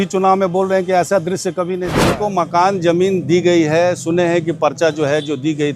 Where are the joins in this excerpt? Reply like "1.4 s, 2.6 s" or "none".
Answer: 2.0 s